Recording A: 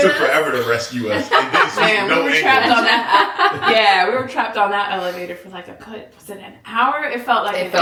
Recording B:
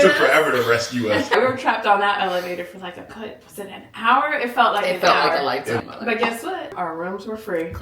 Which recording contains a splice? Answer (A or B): B